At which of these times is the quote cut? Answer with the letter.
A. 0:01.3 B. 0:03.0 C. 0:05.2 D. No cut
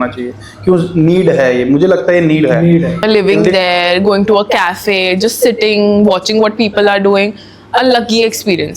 B